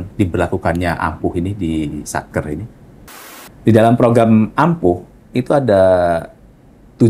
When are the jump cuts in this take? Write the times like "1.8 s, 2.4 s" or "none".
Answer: 3.0 s